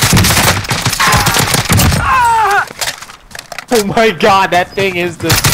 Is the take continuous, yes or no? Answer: yes